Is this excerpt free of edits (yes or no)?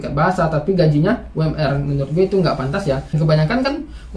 no